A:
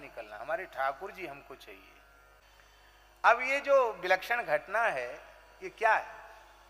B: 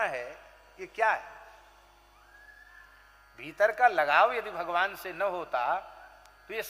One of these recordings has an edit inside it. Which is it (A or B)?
A